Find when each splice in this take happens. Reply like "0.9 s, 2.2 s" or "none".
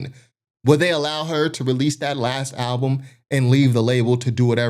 none

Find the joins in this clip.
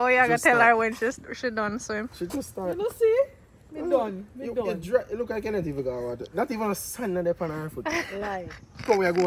none

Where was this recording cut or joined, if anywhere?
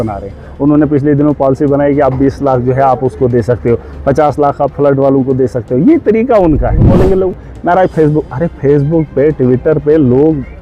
6.9 s

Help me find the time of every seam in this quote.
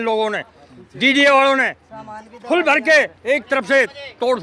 none

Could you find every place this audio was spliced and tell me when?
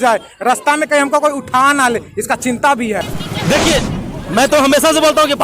3.1 s

